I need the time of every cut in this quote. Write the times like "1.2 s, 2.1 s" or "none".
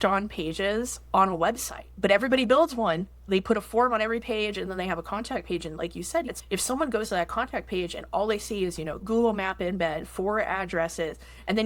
1.9 s, 3.2 s, 6.3 s, 9.0 s